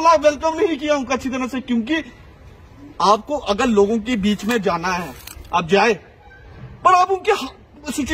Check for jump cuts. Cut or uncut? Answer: uncut